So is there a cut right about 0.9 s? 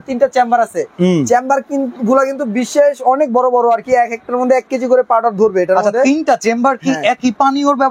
no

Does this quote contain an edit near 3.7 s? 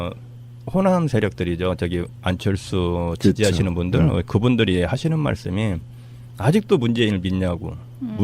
yes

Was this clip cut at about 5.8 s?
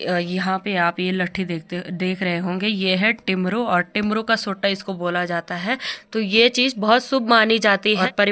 no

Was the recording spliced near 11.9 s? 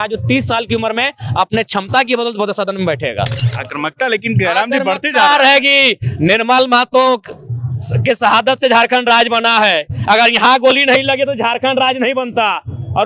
no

